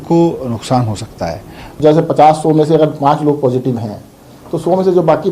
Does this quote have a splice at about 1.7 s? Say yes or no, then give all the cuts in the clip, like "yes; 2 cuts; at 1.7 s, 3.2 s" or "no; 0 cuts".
yes; 1 cut; at 1.7 s